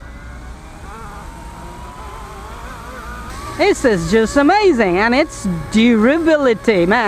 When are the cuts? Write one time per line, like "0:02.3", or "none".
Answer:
0:03.5